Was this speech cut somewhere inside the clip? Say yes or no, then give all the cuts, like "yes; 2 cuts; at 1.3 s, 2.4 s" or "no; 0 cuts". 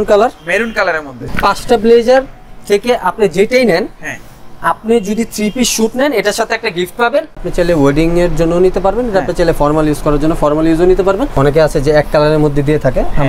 yes; 3 cuts; at 1.2 s, 7.5 s, 11.3 s